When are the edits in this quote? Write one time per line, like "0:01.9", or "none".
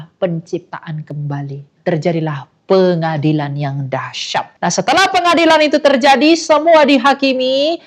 0:01.7
0:04.5